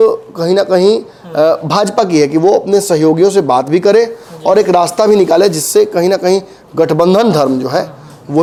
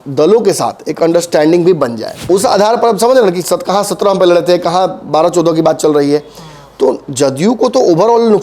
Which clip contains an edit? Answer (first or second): second